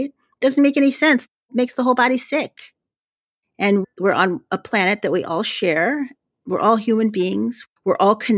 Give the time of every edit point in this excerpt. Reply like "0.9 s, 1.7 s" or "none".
1.4 s, 2.9 s